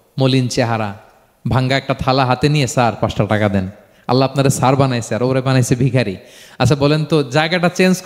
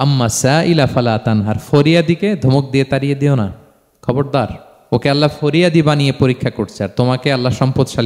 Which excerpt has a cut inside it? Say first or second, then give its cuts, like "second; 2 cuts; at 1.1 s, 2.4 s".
second; 1 cut; at 4.7 s